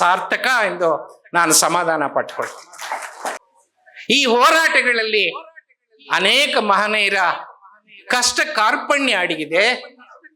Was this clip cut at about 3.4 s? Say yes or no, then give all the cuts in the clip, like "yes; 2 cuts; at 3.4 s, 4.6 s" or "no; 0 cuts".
yes; 1 cut; at 3.4 s